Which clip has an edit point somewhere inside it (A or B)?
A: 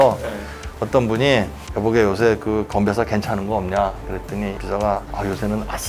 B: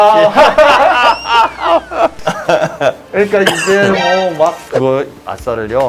B